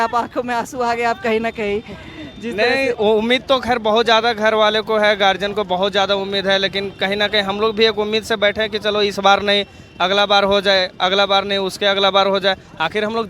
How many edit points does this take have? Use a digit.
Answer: 0